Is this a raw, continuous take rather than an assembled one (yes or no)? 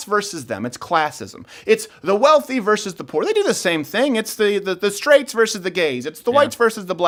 yes